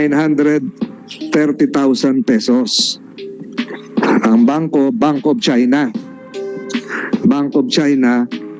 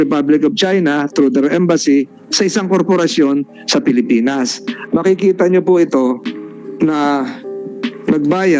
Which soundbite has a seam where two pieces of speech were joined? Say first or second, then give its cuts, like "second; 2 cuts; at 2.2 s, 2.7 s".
second; 1 cut; at 4.7 s